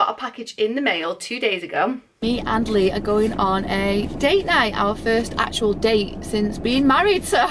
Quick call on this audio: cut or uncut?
cut